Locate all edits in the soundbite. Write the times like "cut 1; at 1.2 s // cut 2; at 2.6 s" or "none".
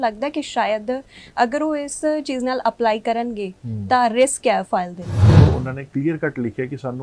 cut 1; at 5.3 s